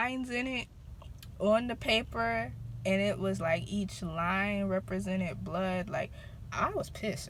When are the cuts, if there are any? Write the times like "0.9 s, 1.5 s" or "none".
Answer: none